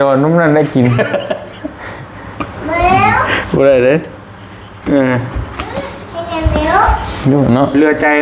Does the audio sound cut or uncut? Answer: uncut